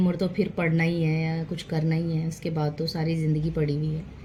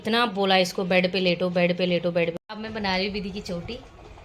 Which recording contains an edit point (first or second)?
second